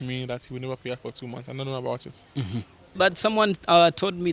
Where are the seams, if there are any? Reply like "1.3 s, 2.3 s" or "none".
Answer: 3.0 s